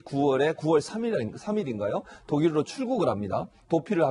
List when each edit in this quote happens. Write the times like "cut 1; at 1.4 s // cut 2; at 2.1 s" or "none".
cut 1; at 3.2 s